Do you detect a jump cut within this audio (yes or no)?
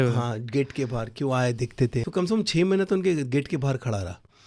yes